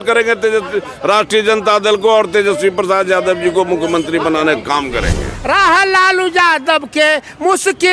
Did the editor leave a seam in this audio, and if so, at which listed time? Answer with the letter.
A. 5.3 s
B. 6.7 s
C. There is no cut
A